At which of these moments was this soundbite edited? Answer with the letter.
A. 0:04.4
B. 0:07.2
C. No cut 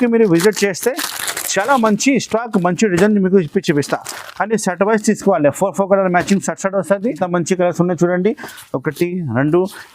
B